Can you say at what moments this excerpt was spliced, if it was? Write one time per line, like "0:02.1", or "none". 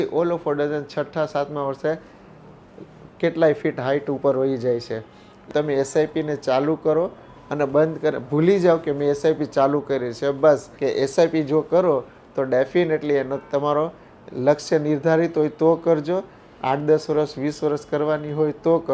0:05.4
0:10.7